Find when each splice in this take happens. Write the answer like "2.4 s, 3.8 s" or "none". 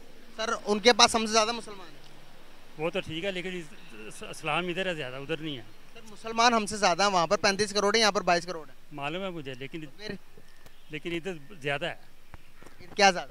none